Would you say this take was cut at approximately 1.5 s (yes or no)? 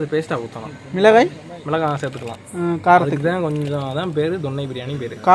no